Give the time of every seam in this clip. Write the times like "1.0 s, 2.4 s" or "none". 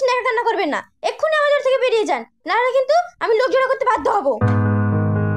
none

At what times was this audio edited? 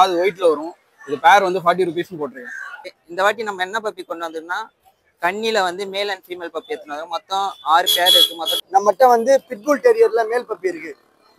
3.0 s, 8.6 s

